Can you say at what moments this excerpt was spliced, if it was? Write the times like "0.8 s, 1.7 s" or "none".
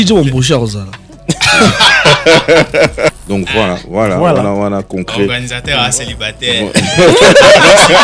3.2 s